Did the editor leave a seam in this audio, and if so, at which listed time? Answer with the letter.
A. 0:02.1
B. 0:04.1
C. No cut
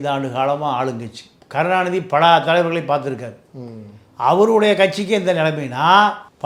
C